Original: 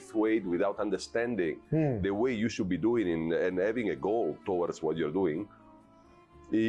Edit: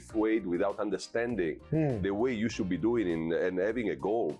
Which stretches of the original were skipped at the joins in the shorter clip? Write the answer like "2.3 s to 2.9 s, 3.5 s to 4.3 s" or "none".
none